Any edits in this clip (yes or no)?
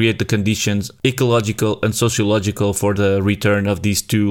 yes